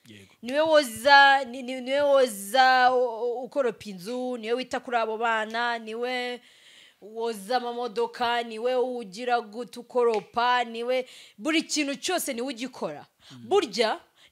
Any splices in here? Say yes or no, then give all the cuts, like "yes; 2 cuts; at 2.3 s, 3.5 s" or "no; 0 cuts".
no; 0 cuts